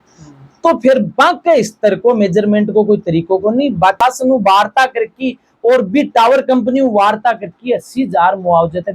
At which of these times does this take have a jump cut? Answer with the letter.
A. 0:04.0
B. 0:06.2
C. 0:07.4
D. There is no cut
A